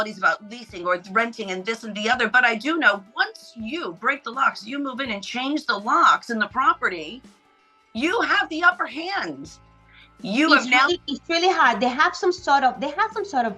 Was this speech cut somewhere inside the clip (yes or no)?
no